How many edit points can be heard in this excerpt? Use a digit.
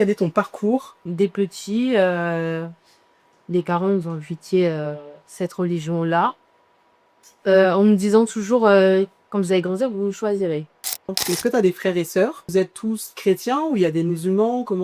3